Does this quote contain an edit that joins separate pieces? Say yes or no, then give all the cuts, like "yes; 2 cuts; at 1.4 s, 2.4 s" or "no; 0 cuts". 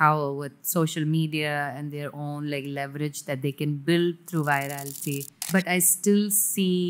yes; 1 cut; at 5.4 s